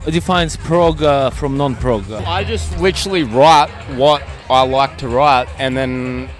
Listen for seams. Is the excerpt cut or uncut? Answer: cut